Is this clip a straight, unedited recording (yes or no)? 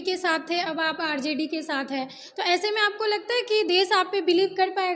yes